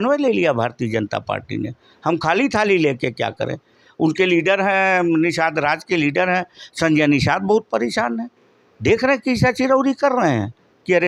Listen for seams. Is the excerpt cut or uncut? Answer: uncut